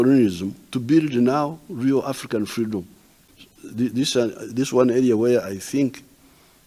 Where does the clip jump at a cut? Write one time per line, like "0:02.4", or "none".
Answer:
none